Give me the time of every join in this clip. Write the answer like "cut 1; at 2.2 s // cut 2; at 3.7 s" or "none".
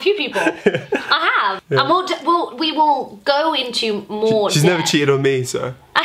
cut 1; at 1.6 s